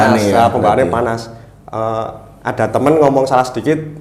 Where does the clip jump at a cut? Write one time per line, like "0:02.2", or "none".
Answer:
none